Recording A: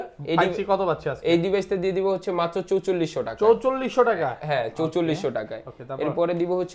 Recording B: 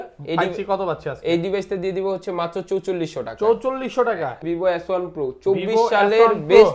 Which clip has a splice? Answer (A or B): B